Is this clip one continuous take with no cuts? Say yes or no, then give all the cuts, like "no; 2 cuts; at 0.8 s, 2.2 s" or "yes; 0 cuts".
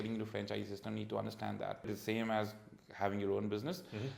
no; 1 cut; at 1.9 s